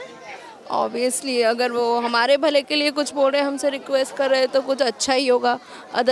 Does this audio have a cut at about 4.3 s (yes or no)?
no